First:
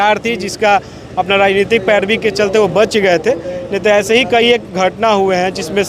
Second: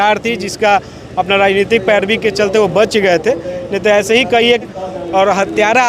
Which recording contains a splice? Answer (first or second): second